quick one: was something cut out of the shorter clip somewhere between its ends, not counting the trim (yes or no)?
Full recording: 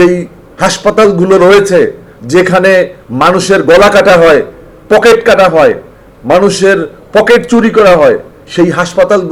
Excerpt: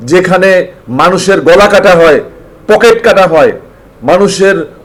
no